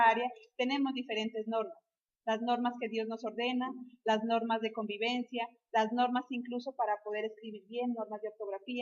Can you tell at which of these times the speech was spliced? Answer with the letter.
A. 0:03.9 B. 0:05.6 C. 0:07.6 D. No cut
B